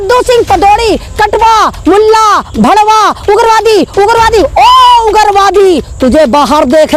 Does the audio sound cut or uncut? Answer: uncut